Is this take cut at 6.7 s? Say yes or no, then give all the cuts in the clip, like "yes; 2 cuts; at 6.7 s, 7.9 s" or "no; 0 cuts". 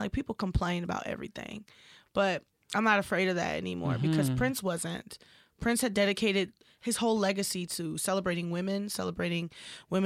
yes; 1 cut; at 6.7 s